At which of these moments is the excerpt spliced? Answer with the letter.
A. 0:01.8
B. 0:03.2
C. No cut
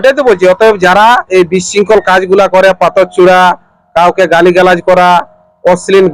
C